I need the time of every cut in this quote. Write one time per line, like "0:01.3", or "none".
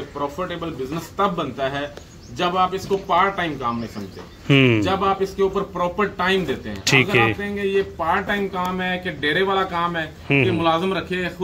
none